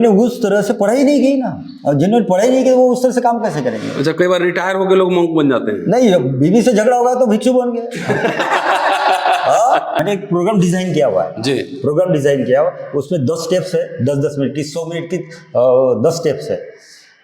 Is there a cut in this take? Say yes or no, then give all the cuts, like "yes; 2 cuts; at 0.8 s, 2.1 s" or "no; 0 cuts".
yes; 1 cut; at 10.0 s